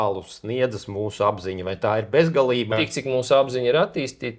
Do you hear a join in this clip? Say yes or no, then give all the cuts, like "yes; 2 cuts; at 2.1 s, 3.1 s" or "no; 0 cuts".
yes; 1 cut; at 2.7 s